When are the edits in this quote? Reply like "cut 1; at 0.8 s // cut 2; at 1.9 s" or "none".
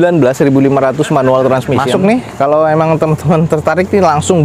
cut 1; at 1.8 s